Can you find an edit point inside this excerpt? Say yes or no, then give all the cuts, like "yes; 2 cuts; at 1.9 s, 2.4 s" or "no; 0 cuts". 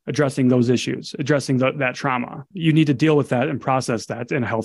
yes; 1 cut; at 2.5 s